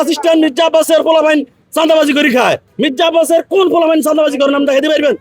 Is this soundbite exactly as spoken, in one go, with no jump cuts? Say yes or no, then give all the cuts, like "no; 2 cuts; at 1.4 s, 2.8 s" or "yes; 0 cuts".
no; 1 cut; at 2.7 s